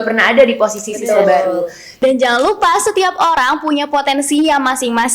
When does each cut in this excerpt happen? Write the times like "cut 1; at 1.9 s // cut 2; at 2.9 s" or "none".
cut 1; at 1.8 s